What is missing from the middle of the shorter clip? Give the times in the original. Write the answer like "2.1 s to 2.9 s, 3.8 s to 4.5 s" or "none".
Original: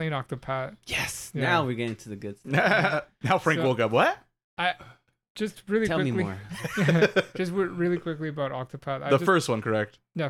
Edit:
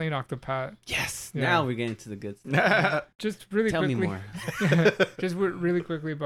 3.1 s to 5.3 s